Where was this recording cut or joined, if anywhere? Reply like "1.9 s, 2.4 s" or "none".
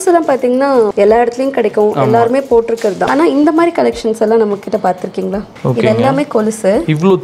0.9 s, 3.1 s, 5.5 s